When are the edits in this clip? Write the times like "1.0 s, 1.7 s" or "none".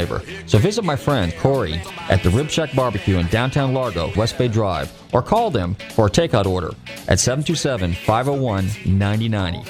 1.5 s, 4.1 s

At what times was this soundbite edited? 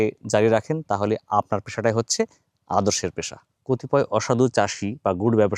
3.5 s

